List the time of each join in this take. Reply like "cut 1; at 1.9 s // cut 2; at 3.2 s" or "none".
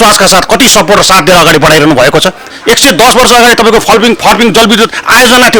cut 1; at 2.4 s